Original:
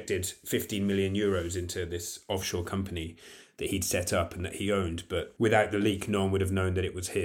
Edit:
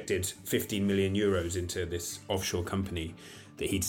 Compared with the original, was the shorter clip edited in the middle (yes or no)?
no